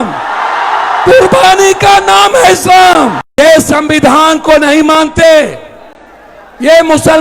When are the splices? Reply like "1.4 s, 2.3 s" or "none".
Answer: 3.2 s